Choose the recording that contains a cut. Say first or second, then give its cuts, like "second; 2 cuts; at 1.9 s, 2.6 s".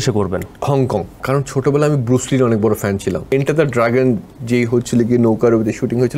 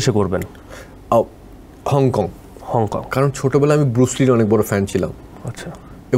first; 2 cuts; at 1.0 s, 3.3 s